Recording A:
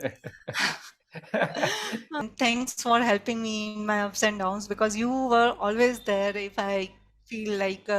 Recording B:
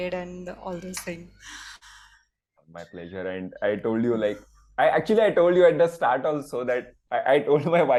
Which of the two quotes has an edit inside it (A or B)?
A